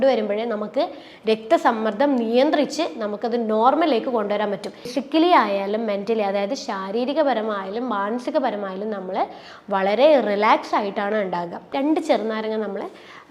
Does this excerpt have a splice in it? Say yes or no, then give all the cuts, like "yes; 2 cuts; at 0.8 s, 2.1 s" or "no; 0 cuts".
yes; 2 cuts; at 4.9 s, 11.6 s